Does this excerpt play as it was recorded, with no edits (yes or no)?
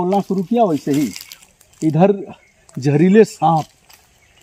yes